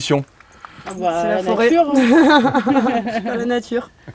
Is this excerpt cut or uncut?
uncut